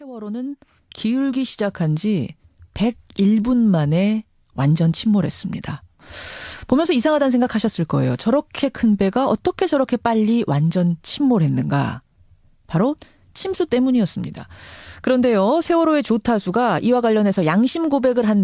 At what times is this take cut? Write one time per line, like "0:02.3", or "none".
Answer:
none